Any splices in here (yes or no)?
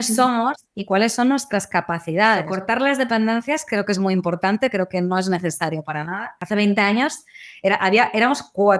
yes